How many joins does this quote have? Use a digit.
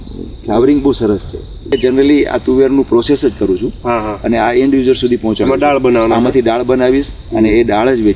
1